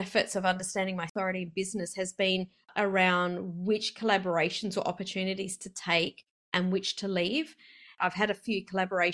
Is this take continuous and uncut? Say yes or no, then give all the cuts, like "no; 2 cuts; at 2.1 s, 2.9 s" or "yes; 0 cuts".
no; 3 cuts; at 1.1 s, 2.7 s, 7.9 s